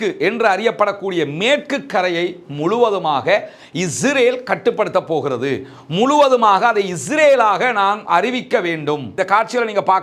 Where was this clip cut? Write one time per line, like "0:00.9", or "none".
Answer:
0:09.1

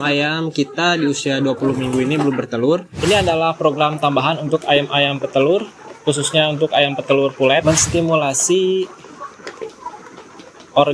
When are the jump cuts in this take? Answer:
0:02.9
0:07.6

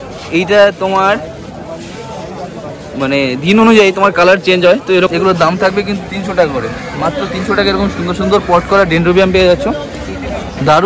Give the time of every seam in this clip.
0:05.1

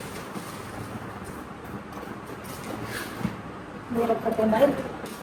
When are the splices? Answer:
none

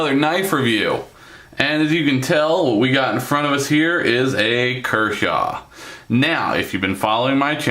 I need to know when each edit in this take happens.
0:04.8

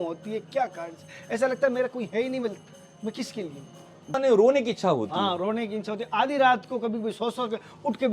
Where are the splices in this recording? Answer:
0:04.1

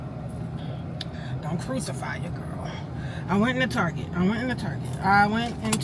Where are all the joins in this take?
none

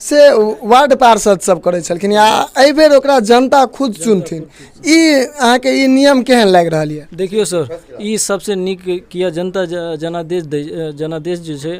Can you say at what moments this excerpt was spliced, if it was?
none

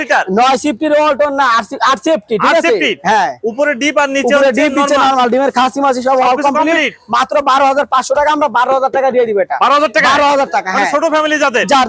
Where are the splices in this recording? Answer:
none

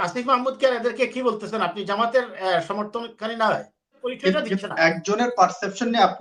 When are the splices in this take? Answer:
0:04.0

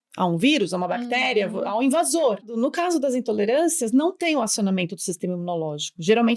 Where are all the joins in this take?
0:02.5

